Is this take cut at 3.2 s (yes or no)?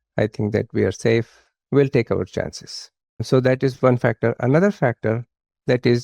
yes